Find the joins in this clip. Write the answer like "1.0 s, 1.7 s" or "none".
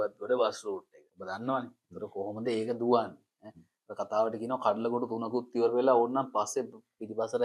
1.0 s